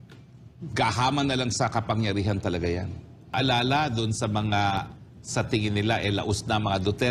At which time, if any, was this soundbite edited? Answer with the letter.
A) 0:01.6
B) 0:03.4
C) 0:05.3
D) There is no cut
B